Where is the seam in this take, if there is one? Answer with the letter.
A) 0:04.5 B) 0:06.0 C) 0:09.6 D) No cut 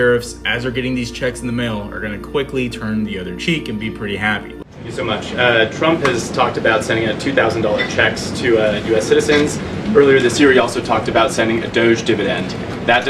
A